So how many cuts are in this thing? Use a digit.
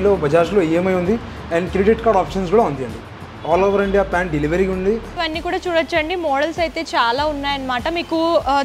1